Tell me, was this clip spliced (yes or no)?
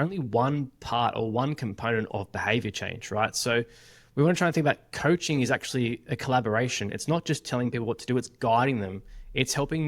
no